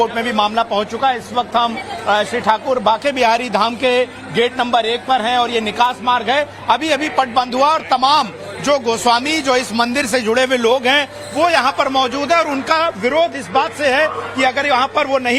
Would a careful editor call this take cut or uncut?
uncut